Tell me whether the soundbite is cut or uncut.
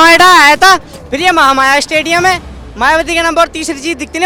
uncut